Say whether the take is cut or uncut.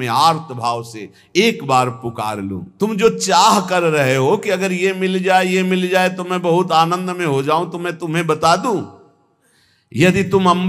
cut